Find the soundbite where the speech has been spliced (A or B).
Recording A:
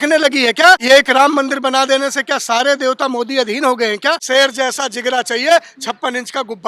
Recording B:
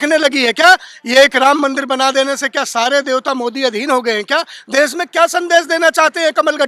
A